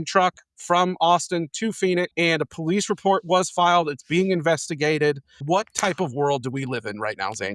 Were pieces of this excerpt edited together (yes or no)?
yes